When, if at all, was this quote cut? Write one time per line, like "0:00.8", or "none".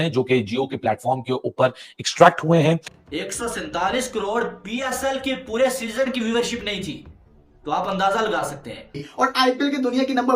0:02.9
0:09.0